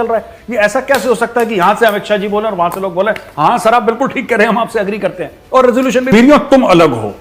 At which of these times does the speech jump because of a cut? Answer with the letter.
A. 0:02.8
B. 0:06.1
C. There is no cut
B